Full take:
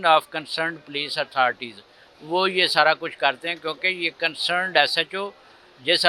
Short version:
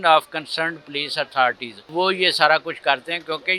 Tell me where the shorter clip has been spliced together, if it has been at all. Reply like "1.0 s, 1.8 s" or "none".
1.7 s